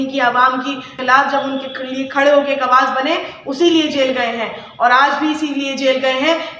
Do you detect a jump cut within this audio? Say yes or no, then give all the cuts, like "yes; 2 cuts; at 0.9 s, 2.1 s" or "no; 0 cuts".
yes; 1 cut; at 1.0 s